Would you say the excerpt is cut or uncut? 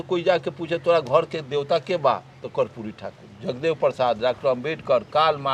uncut